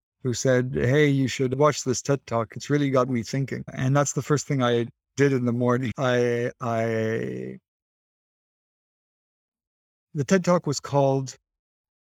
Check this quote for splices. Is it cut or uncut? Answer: uncut